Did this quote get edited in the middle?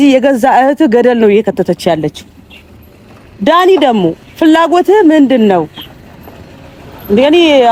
no; 0 cuts

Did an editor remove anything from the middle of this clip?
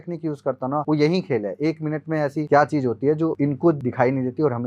yes; 3 cuts; at 0.8 s, 2.4 s, 3.6 s

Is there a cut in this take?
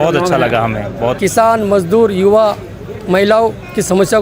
yes; 1 cut; at 1.2 s

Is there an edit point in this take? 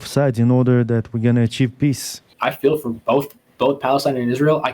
yes; 2 cuts; at 2.3 s, 3.4 s

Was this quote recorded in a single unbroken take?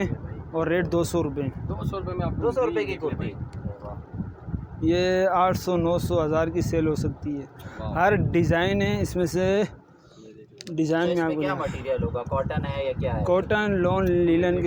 yes; 0 cuts

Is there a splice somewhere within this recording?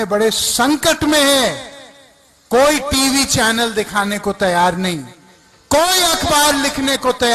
no; 0 cuts

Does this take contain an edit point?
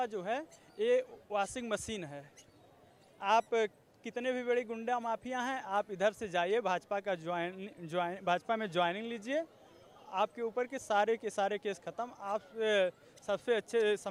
no; 0 cuts

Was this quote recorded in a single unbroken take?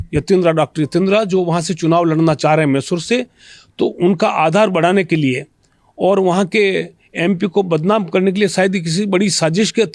yes; 0 cuts

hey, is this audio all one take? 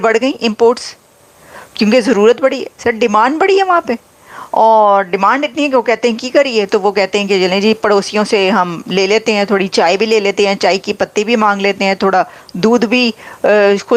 yes; 0 cuts

